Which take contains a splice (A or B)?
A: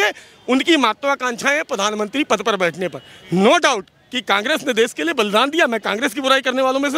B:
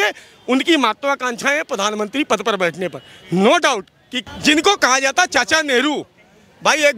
B